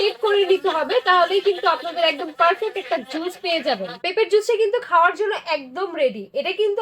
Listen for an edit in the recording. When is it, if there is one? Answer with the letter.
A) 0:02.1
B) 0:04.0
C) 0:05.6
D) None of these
B